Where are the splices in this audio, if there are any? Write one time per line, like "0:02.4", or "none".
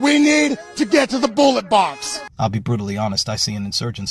0:02.3